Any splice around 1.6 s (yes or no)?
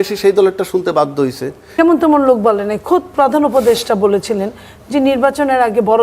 yes